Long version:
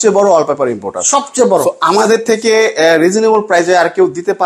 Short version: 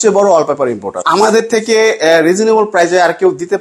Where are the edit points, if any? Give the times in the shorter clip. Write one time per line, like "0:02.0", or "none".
0:01.0